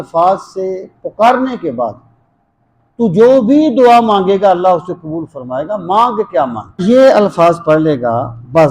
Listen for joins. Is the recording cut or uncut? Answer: cut